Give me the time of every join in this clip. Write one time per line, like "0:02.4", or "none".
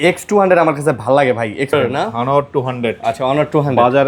0:01.7